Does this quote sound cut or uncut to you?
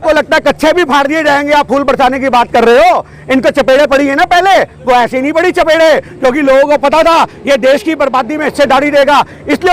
uncut